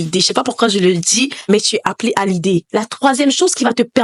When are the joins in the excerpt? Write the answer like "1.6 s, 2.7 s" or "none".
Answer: none